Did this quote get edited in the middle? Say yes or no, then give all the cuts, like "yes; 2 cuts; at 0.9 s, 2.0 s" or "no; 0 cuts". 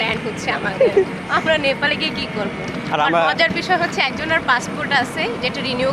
no; 0 cuts